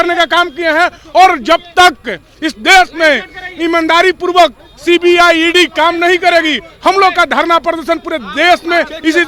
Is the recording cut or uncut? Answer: uncut